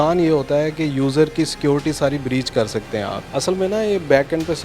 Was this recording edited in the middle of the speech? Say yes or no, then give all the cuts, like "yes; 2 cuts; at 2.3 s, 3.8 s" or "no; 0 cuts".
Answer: yes; 1 cut; at 3.2 s